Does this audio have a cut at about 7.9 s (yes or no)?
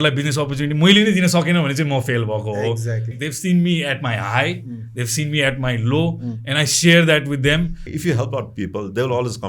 yes